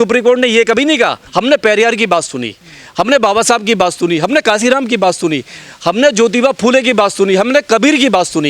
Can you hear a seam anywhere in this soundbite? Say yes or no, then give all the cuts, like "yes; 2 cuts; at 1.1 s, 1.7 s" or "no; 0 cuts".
yes; 1 cut; at 1.2 s